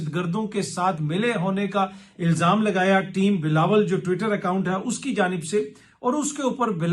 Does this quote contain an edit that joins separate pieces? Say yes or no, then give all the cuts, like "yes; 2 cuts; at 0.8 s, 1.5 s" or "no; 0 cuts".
no; 0 cuts